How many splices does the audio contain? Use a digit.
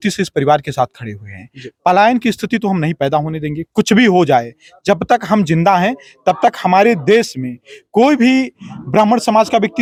0